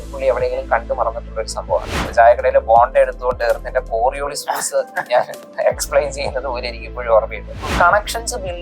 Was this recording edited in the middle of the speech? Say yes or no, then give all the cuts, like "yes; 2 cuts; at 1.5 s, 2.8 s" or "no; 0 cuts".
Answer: yes; 2 cuts; at 2.0 s, 7.6 s